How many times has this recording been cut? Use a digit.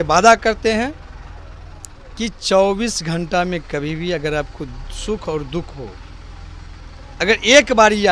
0